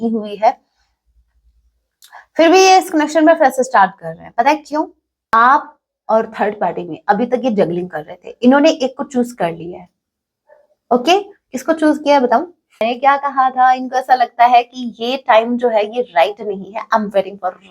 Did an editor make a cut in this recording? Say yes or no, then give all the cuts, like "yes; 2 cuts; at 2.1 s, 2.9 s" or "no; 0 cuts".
yes; 2 cuts; at 5.1 s, 12.8 s